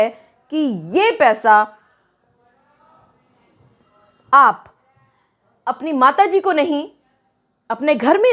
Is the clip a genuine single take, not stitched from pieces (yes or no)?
yes